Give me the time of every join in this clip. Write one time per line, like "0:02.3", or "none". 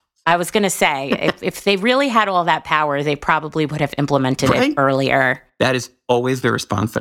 0:05.3